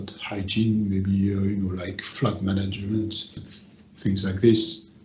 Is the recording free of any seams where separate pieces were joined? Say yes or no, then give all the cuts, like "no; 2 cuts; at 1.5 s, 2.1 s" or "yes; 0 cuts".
no; 2 cuts; at 2.1 s, 3.3 s